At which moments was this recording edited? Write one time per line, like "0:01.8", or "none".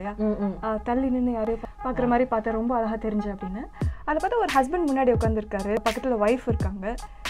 0:01.7
0:05.8